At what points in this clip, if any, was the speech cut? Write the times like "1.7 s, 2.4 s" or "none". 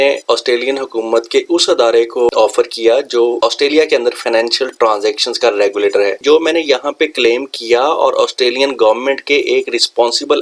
2.3 s, 6.2 s

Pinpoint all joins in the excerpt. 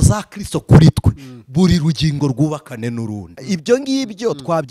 3.3 s

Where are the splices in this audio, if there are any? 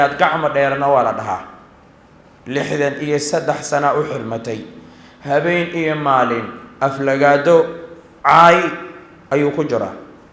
none

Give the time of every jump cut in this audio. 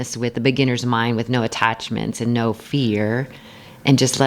none

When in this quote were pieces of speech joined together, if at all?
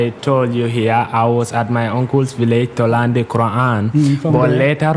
none

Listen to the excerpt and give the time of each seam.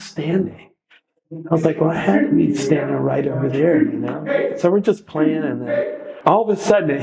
6.1 s

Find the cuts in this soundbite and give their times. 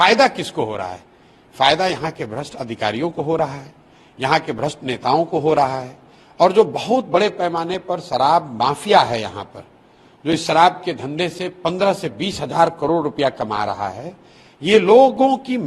none

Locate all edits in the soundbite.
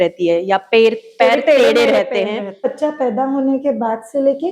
2.6 s

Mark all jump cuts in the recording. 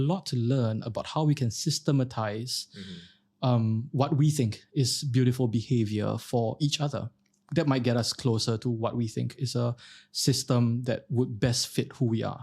7.4 s

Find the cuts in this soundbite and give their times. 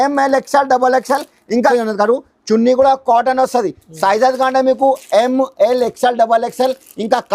1.7 s

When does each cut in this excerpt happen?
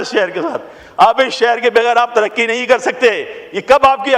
none

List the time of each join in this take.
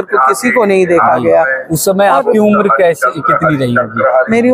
none

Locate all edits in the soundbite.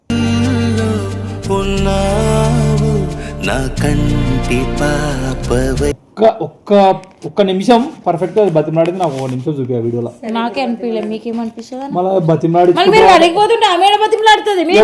6.1 s

